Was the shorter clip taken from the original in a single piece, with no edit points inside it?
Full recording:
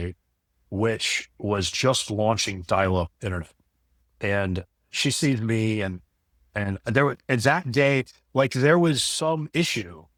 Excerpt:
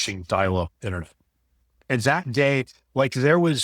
no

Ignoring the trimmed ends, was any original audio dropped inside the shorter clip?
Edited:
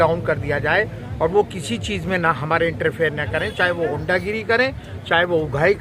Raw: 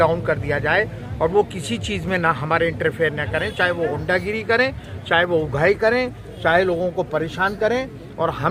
no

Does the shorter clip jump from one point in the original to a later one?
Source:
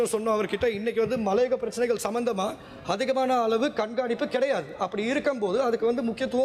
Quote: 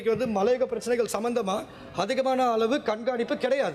no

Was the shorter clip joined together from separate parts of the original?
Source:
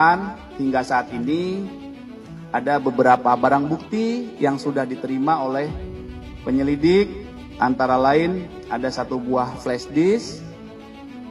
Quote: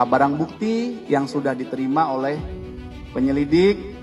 no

